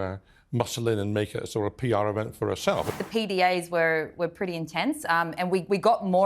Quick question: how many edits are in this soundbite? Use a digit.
1